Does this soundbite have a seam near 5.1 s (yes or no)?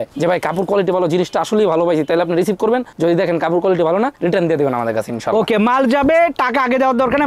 no